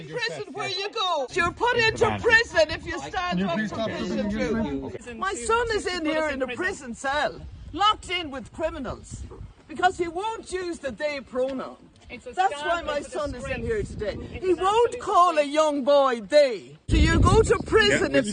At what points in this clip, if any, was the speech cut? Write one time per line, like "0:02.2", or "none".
0:01.3
0:05.0
0:16.9